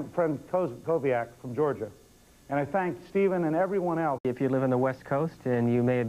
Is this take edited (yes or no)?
no